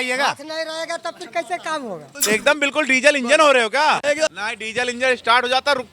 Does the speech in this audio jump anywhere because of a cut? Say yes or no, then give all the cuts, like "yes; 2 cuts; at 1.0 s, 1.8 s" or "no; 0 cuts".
yes; 2 cuts; at 2.2 s, 4.3 s